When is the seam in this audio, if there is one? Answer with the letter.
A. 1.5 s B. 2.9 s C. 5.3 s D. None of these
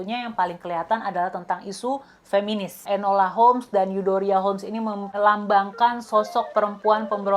B